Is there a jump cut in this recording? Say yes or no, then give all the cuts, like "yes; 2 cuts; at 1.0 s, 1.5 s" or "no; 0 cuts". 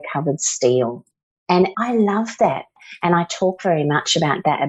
yes; 2 cuts; at 1.6 s, 2.7 s